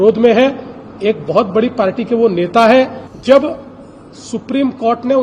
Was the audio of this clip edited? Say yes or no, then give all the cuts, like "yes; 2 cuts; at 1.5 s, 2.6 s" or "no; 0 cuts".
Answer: yes; 1 cut; at 3.1 s